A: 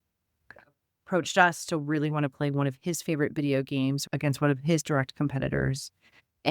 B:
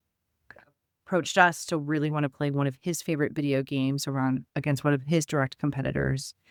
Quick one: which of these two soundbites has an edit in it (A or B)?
A